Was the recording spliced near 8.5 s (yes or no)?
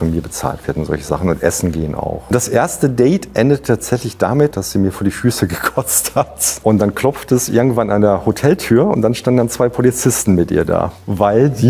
no